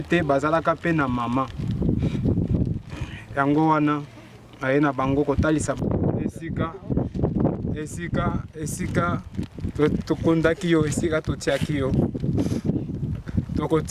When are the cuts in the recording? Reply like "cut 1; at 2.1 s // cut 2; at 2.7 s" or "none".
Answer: cut 1; at 5.8 s